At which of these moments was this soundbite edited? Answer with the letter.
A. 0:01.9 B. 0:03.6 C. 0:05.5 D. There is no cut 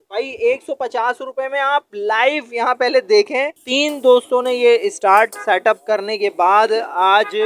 B